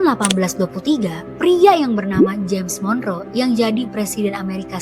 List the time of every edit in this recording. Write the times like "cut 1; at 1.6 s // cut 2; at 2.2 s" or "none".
none